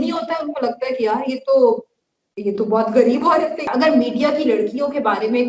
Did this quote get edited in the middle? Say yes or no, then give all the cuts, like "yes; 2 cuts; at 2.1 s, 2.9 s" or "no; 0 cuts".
yes; 1 cut; at 3.6 s